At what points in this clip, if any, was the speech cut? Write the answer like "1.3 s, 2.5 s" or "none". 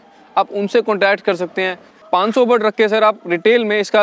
1.9 s

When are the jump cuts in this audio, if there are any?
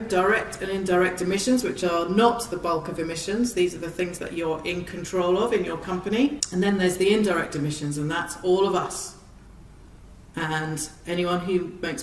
6.4 s

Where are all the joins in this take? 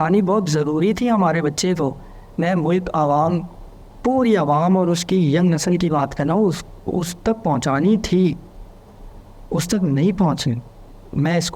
none

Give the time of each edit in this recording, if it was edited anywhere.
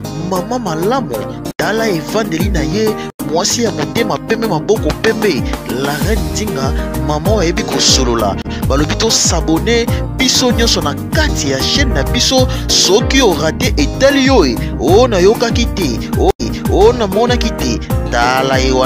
none

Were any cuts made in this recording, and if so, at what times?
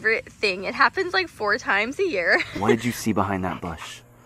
2.5 s

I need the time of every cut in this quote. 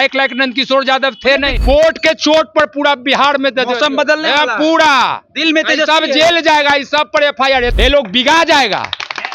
1.5 s, 7.7 s

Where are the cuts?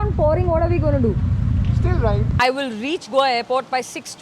2.3 s

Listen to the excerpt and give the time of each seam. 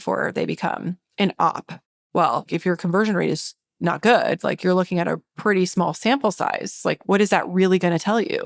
1.0 s, 2.5 s, 7.0 s

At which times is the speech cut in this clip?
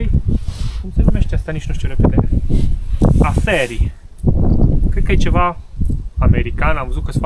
none

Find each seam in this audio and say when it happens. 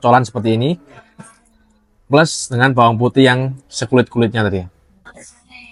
none

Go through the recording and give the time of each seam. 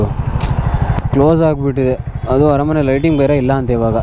0.9 s

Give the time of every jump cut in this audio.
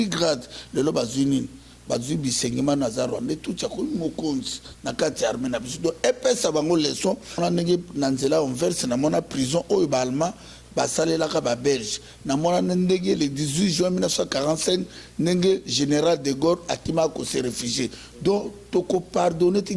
7.4 s

